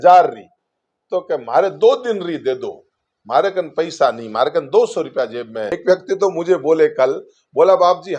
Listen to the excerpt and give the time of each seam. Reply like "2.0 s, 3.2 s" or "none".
5.8 s